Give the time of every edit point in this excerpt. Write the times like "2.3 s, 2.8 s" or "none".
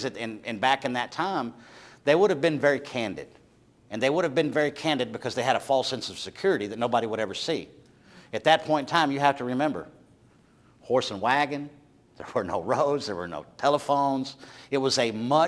none

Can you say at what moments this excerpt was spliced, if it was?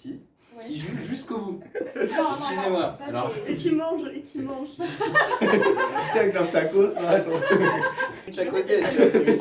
8.3 s

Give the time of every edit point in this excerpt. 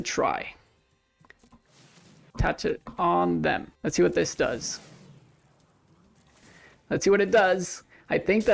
1.3 s, 2.3 s, 3.7 s

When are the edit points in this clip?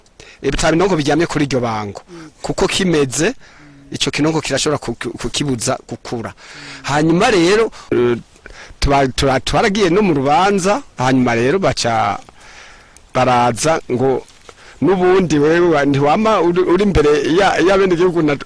8.0 s

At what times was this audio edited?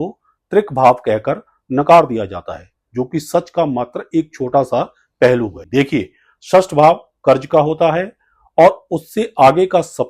5.6 s

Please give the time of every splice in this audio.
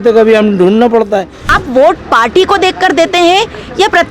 1.5 s

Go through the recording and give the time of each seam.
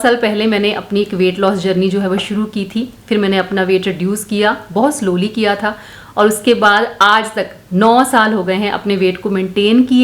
none

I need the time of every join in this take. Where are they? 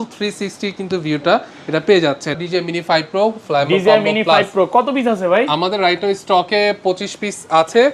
2.4 s

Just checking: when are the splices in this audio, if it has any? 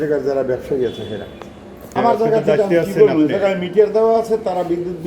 1.8 s

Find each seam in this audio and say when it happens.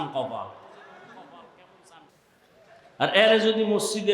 none

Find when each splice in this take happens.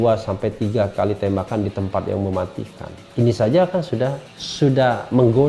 none

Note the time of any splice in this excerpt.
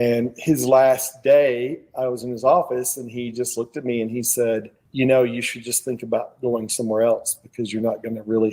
4.8 s

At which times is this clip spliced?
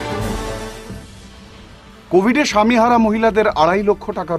0.9 s

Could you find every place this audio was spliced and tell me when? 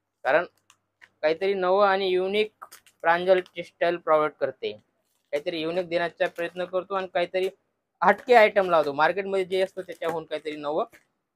none

